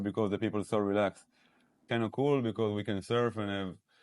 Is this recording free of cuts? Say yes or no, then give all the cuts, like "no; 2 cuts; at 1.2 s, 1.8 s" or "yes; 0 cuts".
no; 1 cut; at 1.9 s